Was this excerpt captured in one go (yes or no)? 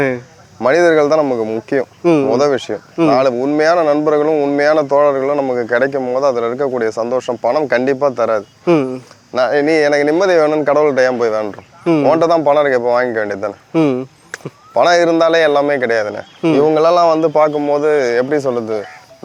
yes